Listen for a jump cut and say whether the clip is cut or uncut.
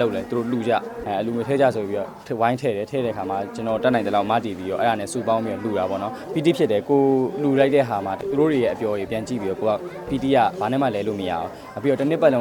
cut